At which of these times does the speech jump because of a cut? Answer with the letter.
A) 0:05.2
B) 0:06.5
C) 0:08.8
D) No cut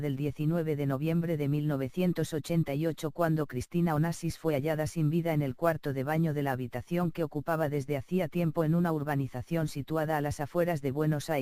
D